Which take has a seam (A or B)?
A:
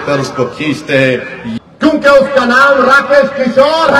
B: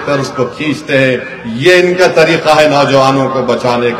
A